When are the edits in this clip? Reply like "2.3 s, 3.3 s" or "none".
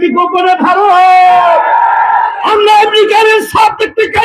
2.4 s